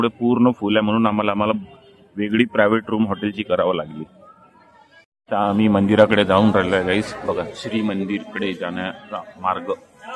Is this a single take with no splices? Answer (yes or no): yes